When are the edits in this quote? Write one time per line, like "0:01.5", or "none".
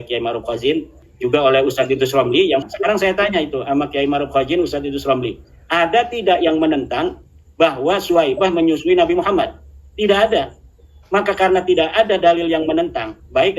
0:01.0
0:02.6